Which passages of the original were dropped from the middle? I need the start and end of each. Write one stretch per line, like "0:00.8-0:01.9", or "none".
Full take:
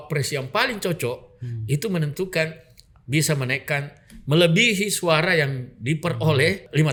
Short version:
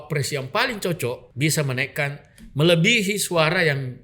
0:01.3-0:03.0